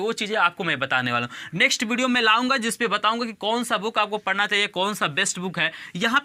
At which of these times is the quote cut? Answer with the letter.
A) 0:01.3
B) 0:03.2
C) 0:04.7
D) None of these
D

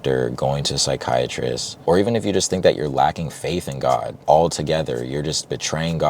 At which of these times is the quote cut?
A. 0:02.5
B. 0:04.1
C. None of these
B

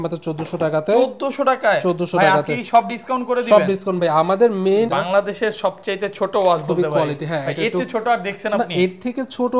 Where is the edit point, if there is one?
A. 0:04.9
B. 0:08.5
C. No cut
A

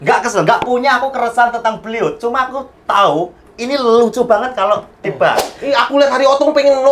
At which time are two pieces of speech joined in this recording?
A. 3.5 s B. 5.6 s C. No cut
B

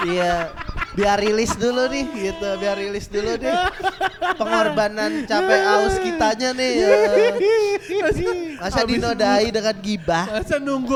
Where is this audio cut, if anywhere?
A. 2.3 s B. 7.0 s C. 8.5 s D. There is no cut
D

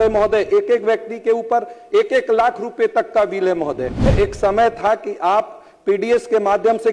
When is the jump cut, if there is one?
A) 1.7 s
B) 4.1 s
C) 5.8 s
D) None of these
B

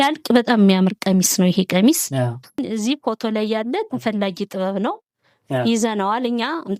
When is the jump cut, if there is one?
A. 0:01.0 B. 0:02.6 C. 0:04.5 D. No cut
B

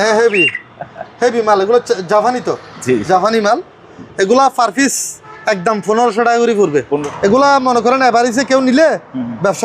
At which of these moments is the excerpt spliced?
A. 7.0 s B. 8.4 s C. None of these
A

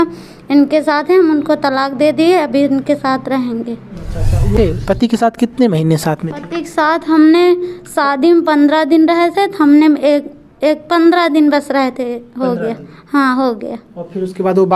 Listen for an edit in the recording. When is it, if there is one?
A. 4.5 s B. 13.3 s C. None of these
A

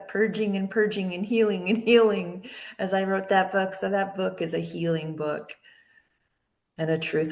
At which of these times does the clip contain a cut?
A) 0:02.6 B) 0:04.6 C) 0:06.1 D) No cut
D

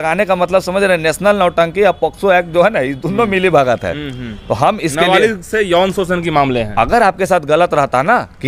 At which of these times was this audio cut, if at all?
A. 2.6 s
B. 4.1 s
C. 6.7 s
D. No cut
D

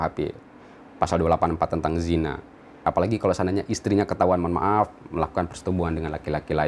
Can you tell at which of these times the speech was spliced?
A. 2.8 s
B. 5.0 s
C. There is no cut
A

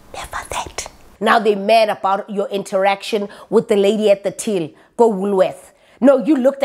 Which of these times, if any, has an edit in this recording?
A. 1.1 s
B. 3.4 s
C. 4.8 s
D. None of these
A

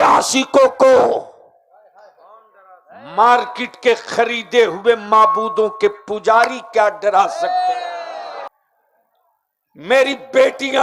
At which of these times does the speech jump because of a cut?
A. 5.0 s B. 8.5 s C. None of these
B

